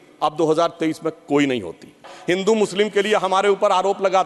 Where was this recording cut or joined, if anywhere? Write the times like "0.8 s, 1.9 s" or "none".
2.1 s